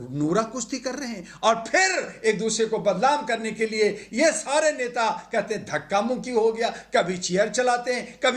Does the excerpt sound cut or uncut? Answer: uncut